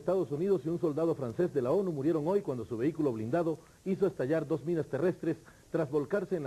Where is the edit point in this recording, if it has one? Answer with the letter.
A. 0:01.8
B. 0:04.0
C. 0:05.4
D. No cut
B